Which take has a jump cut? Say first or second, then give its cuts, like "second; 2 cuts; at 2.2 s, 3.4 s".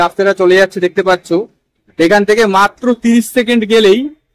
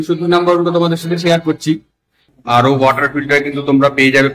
second; 1 cut; at 2.3 s